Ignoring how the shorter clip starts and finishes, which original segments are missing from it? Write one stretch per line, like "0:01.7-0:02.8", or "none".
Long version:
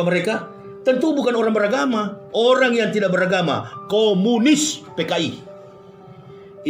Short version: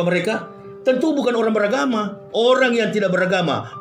none